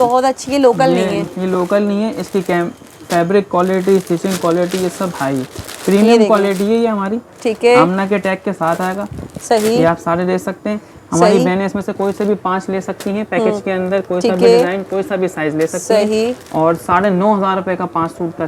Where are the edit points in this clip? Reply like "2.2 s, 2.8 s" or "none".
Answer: none